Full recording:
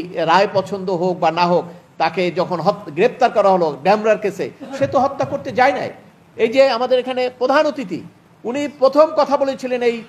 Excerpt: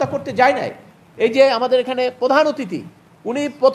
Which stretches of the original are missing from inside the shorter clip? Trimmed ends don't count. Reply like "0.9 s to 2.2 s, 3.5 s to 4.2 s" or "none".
none